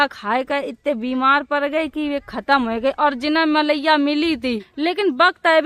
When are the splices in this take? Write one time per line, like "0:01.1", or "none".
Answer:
0:04.6